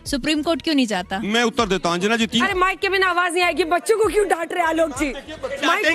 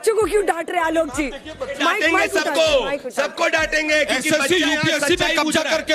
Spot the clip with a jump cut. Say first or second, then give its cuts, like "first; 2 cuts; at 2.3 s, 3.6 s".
first; 1 cut; at 2.4 s